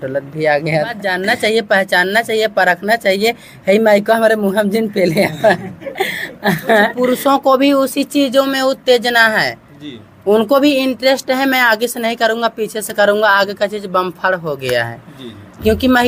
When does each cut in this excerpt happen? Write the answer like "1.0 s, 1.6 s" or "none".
1.1 s, 6.9 s